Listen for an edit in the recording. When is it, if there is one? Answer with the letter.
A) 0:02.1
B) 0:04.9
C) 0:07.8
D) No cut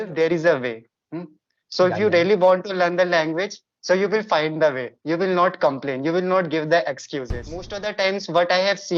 C